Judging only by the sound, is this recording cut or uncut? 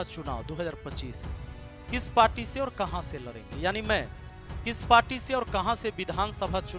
uncut